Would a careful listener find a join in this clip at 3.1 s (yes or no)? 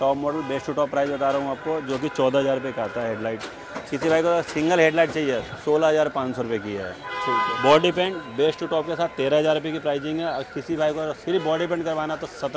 no